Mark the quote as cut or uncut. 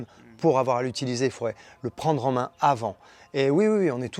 uncut